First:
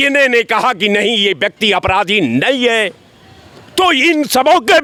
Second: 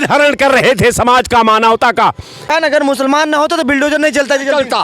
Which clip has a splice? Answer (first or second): second